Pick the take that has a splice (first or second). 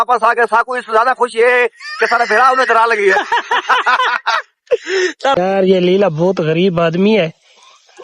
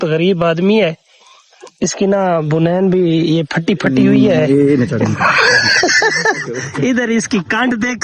first